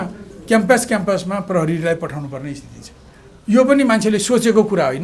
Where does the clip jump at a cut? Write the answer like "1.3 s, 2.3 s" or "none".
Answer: none